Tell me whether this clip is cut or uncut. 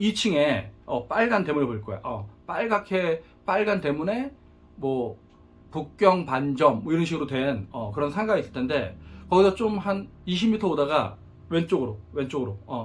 uncut